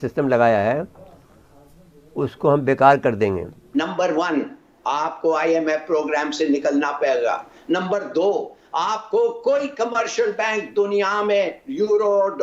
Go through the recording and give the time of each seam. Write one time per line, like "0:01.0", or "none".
none